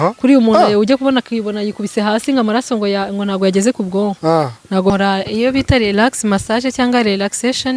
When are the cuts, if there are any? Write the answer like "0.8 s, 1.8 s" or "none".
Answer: 4.9 s